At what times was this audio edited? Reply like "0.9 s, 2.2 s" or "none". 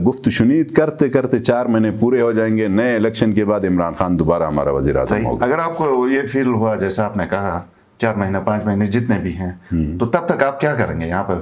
none

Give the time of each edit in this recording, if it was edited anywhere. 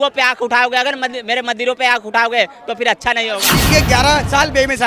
3.4 s

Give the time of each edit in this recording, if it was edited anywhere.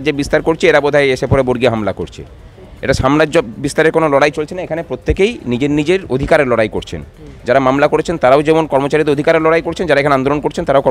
none

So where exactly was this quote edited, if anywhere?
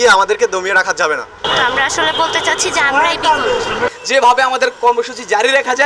1.4 s, 4.0 s

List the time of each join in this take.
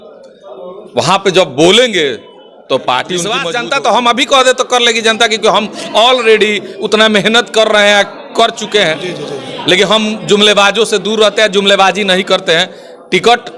3.5 s

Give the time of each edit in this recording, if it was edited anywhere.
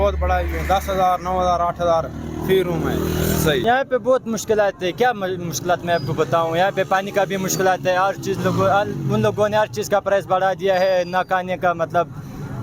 none

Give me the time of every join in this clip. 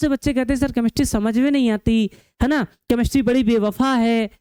none

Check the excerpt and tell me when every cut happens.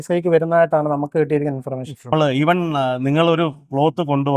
2.1 s

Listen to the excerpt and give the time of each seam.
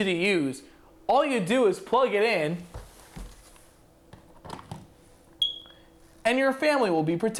none

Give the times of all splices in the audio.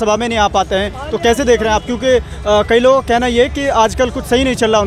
none

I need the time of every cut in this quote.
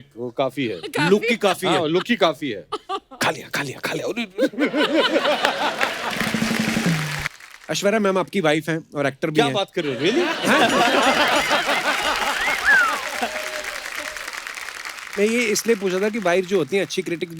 7.2 s

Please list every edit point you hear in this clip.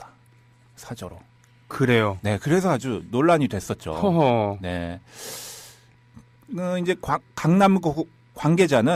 none

